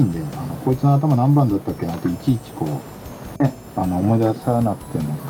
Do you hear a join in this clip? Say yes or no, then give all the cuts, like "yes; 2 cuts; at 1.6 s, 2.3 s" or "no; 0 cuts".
no; 0 cuts